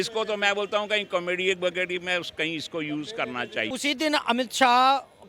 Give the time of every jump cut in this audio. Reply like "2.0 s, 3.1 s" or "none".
3.7 s